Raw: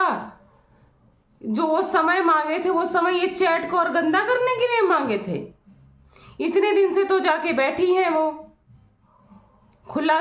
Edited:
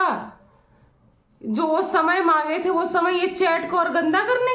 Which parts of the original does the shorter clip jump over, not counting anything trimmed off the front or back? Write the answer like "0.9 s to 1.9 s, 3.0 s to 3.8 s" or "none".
none